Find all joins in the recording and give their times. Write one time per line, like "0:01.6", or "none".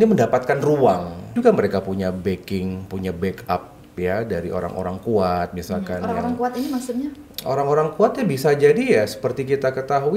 0:01.3